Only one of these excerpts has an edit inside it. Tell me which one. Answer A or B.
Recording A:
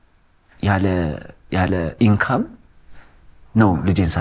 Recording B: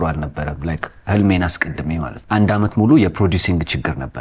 B